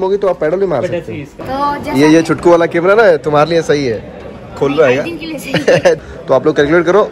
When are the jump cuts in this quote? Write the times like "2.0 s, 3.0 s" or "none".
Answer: 1.4 s, 6.0 s